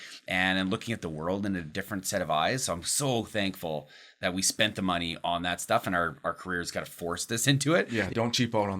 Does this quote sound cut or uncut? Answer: cut